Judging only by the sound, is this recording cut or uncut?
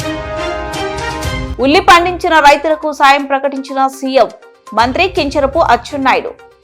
cut